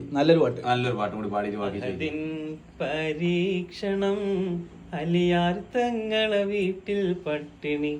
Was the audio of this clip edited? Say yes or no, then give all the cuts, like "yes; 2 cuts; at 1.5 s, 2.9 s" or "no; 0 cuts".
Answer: no; 0 cuts